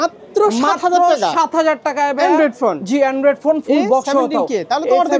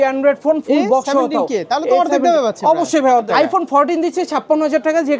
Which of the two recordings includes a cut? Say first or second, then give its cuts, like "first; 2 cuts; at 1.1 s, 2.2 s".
second; 1 cut; at 3.3 s